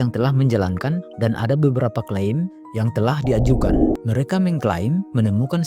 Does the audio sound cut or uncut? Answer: cut